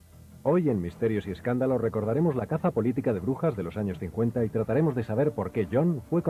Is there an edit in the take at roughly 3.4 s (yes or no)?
no